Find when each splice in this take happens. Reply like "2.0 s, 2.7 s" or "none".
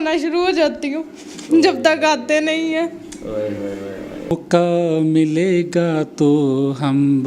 4.3 s

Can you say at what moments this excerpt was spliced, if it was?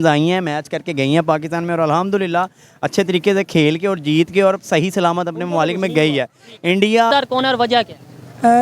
7.1 s

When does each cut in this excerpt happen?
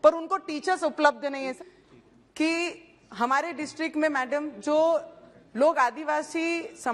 1.5 s

